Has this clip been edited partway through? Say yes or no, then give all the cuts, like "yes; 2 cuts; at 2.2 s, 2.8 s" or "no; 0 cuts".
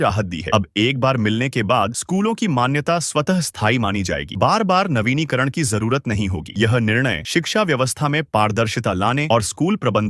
no; 0 cuts